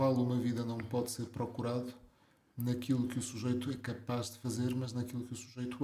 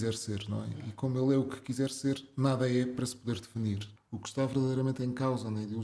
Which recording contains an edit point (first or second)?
second